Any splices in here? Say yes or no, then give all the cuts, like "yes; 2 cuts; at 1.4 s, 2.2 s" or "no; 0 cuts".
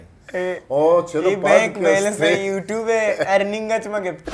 no; 0 cuts